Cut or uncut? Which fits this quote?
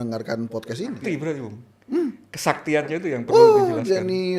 cut